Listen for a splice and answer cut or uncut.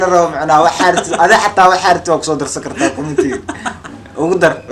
uncut